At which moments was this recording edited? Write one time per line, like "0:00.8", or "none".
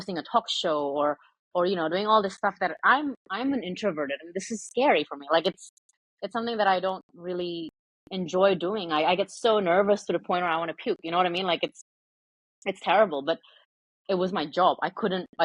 none